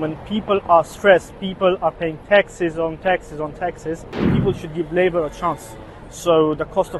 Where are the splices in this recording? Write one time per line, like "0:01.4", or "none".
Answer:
0:04.3